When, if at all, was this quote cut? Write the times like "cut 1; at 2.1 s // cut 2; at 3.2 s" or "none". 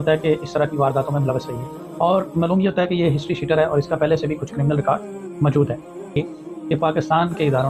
cut 1; at 6.1 s